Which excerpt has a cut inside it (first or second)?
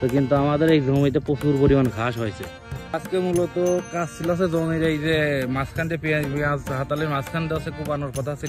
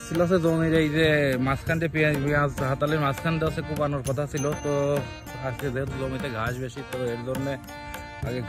first